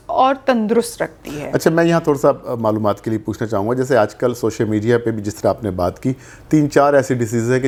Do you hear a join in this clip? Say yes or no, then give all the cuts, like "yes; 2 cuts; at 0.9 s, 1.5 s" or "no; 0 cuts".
no; 0 cuts